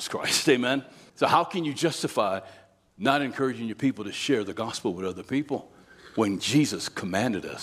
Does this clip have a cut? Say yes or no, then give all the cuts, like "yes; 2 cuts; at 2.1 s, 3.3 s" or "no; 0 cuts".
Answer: yes; 1 cut; at 1.0 s